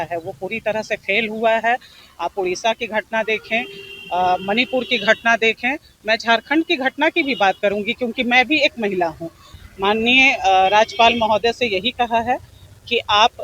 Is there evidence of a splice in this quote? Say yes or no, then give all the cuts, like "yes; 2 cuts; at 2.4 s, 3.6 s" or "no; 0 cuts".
yes; 1 cut; at 9.5 s